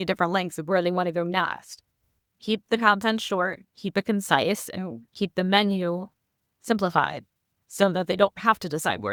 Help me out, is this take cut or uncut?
uncut